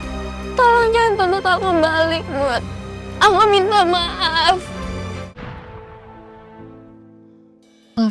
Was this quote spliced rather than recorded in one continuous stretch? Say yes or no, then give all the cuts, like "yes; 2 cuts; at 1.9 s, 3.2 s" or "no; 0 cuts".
yes; 1 cut; at 5.3 s